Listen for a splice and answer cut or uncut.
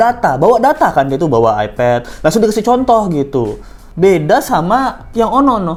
uncut